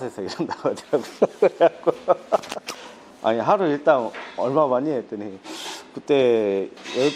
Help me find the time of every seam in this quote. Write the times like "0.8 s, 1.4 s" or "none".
none